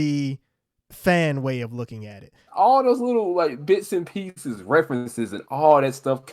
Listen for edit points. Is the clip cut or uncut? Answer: cut